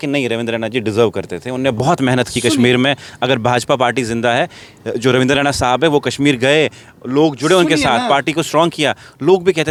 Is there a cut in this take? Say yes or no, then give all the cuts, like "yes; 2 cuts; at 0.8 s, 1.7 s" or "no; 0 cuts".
no; 0 cuts